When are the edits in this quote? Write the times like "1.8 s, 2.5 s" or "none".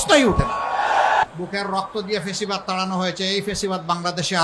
1.2 s